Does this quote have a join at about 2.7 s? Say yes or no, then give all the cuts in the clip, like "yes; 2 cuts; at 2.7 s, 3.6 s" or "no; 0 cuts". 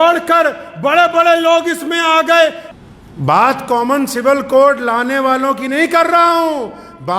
yes; 1 cut; at 2.7 s